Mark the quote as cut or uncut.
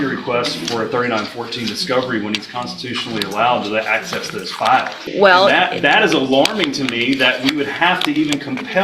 cut